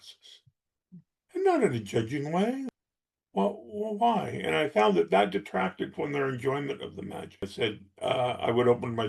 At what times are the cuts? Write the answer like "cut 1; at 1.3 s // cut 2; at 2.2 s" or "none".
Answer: cut 1; at 2.7 s // cut 2; at 7.5 s

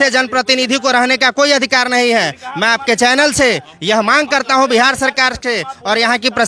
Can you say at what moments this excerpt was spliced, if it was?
none

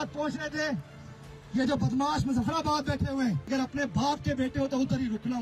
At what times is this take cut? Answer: cut 1; at 3.5 s

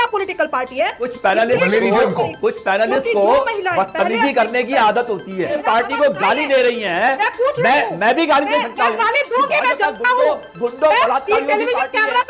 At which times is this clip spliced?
cut 1; at 1.1 s // cut 2; at 5.6 s

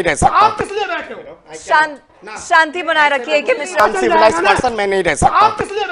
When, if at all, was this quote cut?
cut 1; at 3.8 s

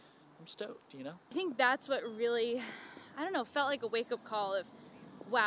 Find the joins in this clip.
cut 1; at 1.3 s

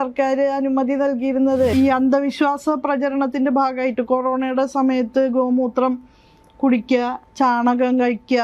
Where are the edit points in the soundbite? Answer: cut 1; at 1.7 s // cut 2; at 7.2 s

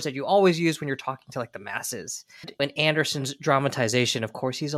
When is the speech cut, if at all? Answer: cut 1; at 2.5 s

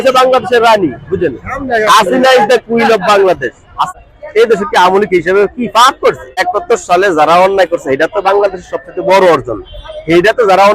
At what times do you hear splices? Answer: cut 1; at 3.9 s // cut 2; at 6.4 s

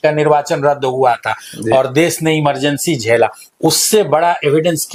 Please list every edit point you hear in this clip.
none

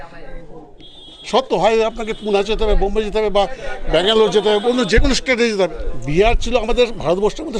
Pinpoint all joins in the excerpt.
cut 1; at 5.9 s

